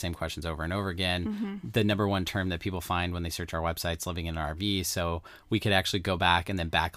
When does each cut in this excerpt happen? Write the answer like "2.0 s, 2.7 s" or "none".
none

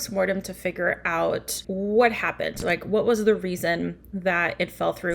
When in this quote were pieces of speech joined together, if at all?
1.6 s

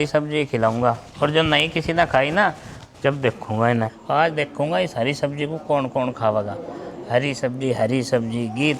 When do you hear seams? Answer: 4.0 s

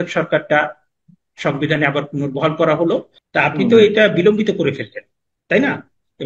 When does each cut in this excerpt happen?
3.2 s

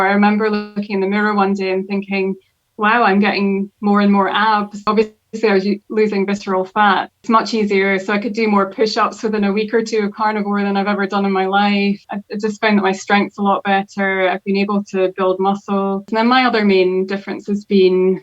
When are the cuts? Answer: 4.8 s, 7.2 s, 12.1 s, 16.1 s

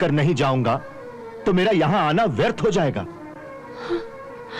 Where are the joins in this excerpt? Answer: none

